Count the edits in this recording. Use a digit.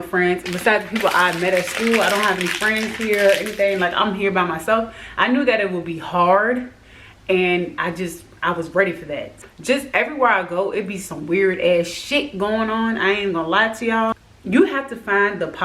2